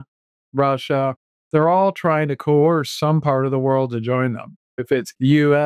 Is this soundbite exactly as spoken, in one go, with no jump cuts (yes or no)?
no